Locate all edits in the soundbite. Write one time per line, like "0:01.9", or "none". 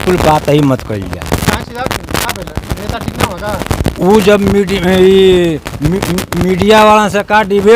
none